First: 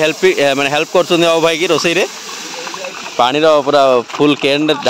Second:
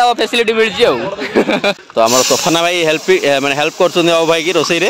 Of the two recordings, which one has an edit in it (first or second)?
second